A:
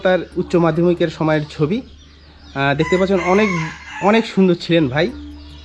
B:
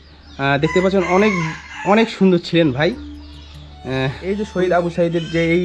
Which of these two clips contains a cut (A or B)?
B